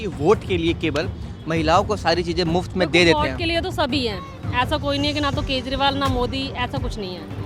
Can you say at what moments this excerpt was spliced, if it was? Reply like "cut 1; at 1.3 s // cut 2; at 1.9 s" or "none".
none